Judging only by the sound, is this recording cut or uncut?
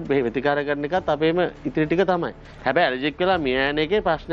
uncut